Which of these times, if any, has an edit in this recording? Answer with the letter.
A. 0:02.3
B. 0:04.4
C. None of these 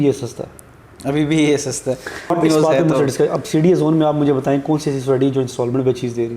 A